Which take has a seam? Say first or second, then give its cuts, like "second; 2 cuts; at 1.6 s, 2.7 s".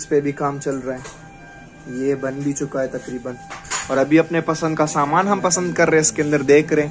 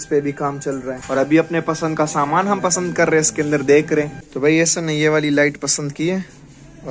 second; 2 cuts; at 1.0 s, 4.2 s